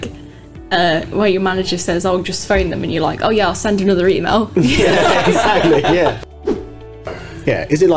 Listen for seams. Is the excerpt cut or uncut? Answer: cut